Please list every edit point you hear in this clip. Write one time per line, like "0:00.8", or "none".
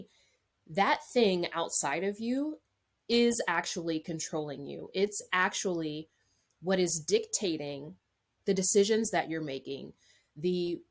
none